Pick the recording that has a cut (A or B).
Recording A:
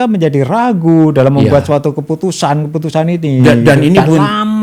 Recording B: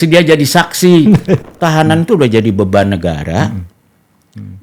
B